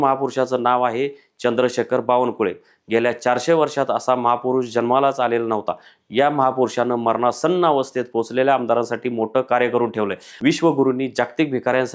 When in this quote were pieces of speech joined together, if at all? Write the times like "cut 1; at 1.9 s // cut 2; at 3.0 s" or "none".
cut 1; at 10.2 s